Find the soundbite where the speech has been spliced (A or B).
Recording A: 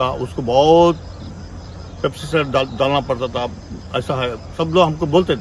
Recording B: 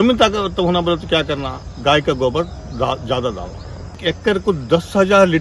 B